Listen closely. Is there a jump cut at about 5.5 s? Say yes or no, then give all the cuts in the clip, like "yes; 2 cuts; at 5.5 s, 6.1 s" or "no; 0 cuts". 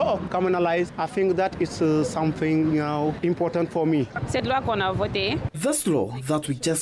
yes; 3 cuts; at 3.2 s, 4.1 s, 5.5 s